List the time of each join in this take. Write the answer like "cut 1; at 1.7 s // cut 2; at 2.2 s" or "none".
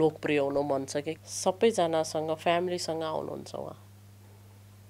cut 1; at 1.1 s

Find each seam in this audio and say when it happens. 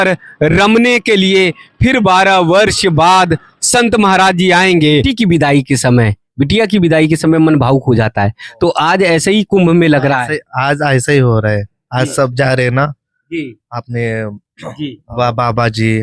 cut 1; at 4.9 s

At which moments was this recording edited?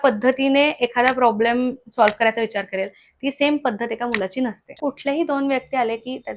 cut 1; at 4.7 s

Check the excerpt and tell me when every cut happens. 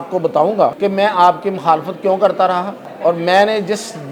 cut 1; at 0.8 s // cut 2; at 2.8 s

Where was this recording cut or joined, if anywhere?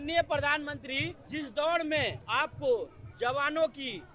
cut 1; at 1.2 s // cut 2; at 2.2 s

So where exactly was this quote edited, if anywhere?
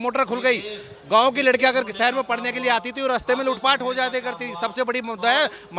none

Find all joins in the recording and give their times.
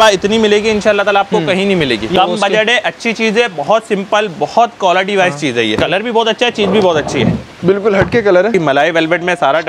cut 1; at 2.1 s // cut 2; at 5.8 s // cut 3; at 8.5 s

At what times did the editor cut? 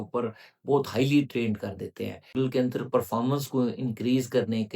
cut 1; at 2.3 s

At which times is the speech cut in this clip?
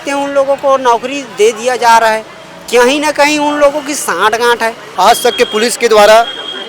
cut 1; at 4.8 s

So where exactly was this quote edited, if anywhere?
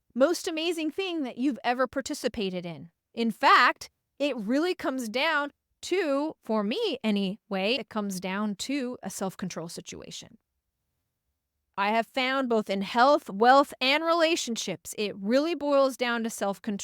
cut 1; at 7.8 s // cut 2; at 11.7 s

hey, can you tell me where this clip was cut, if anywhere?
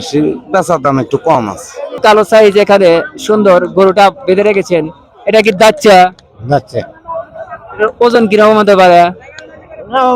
cut 1; at 2.0 s

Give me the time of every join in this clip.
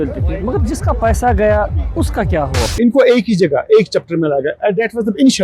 cut 1; at 2.7 s

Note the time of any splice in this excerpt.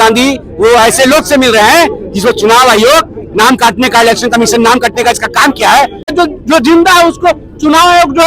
cut 1; at 6.1 s

